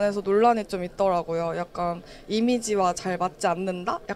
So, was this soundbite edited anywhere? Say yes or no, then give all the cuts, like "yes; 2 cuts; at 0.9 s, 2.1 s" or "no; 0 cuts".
no; 0 cuts